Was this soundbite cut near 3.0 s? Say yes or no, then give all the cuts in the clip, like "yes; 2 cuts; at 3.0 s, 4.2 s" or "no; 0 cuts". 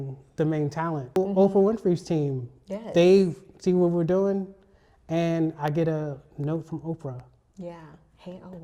no; 1 cut; at 1.2 s